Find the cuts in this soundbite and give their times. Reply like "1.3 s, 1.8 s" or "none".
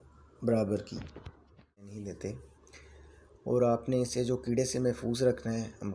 1.8 s